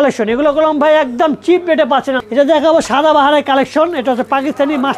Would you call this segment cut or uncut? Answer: cut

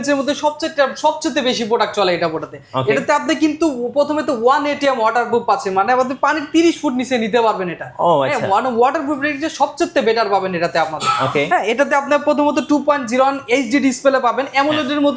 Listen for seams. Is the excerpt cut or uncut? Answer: uncut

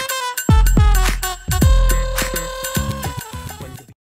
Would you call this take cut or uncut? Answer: cut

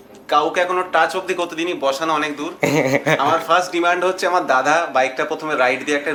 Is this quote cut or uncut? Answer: uncut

